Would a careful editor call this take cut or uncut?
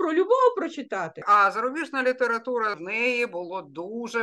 cut